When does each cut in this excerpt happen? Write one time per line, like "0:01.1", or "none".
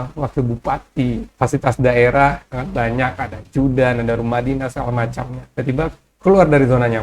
0:01.3
0:02.5
0:05.3